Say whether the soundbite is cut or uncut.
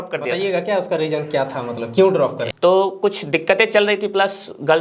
cut